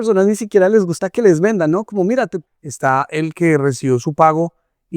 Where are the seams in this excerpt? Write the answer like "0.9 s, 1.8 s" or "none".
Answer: 2.4 s